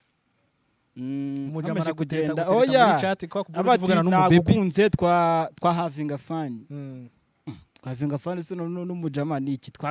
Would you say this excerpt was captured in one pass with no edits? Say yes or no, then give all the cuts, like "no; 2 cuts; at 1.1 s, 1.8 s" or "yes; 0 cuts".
yes; 0 cuts